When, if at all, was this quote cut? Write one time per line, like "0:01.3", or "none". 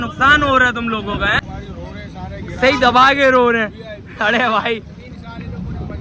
0:01.4